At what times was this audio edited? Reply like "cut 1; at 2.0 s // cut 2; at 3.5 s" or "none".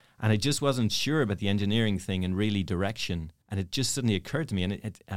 cut 1; at 3.4 s